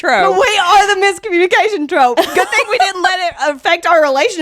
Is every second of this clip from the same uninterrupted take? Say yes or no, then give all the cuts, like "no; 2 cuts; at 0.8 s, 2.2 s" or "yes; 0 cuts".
yes; 0 cuts